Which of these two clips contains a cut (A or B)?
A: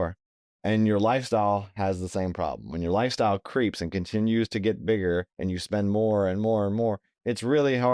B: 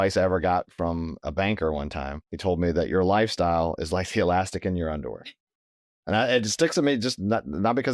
B